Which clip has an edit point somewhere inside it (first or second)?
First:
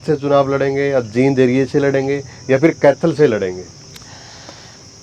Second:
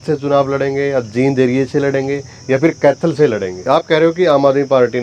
second